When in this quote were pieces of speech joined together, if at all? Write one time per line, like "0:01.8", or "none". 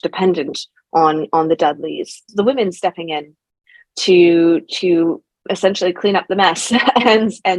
0:02.3